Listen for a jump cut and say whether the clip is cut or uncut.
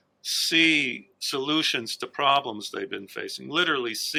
uncut